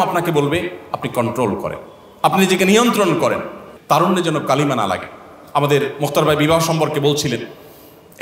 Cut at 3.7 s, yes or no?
yes